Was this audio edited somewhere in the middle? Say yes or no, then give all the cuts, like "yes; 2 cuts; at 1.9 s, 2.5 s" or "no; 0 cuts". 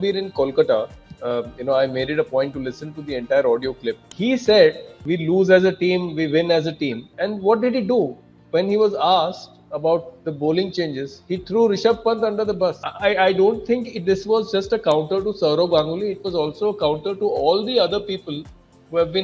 yes; 4 cuts; at 4.1 s, 5.0 s, 7.0 s, 12.9 s